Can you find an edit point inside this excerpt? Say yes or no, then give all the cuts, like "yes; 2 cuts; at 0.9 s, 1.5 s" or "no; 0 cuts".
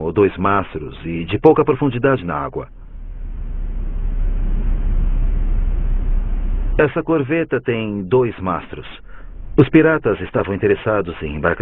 no; 0 cuts